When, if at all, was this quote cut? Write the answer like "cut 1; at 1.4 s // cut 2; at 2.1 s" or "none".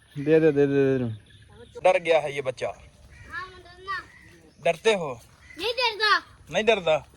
cut 1; at 1.6 s

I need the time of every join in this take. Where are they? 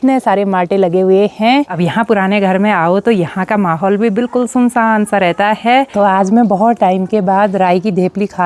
cut 1; at 1.7 s // cut 2; at 5.9 s

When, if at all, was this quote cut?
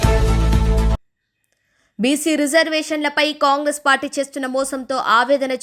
cut 1; at 0.9 s

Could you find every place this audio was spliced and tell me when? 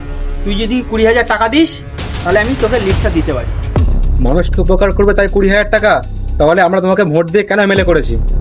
none

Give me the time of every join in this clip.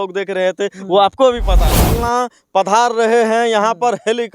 cut 1; at 2.0 s

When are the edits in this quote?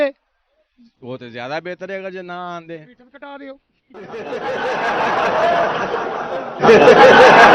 cut 1; at 6.6 s

